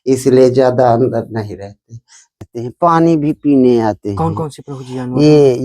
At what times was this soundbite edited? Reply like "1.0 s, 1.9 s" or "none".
2.4 s